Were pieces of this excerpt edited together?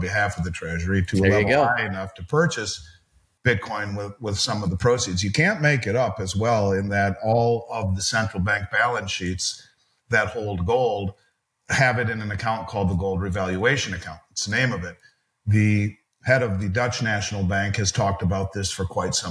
no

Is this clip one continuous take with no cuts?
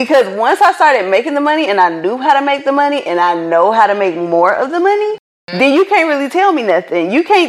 yes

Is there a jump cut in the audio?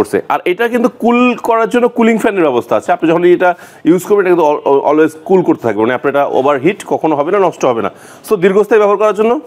no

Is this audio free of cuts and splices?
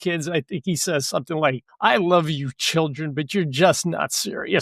no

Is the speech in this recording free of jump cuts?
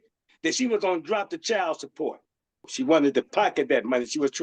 no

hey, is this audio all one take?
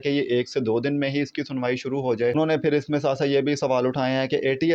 no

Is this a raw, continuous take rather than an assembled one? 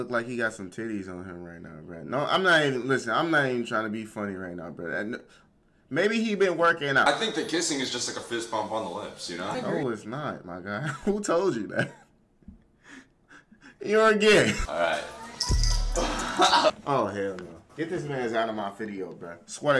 no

